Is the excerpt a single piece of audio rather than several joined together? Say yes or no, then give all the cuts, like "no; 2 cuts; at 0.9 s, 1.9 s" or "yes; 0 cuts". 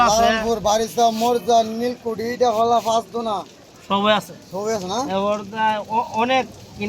yes; 0 cuts